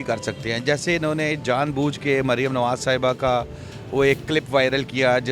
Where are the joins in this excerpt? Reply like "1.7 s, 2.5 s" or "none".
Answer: none